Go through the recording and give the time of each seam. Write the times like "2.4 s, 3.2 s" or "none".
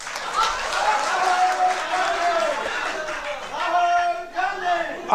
none